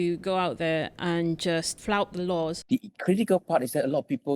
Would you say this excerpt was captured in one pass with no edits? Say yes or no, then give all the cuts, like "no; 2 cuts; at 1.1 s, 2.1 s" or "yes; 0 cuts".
no; 2 cuts; at 1.7 s, 2.6 s